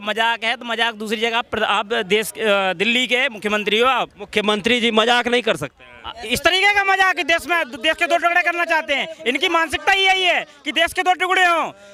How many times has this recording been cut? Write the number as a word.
zero